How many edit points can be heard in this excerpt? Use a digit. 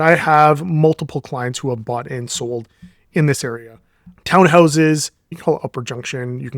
1